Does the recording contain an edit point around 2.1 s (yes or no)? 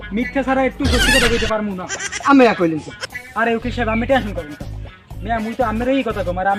yes